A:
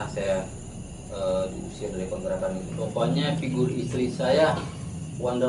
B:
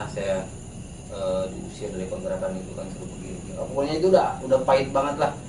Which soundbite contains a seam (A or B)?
A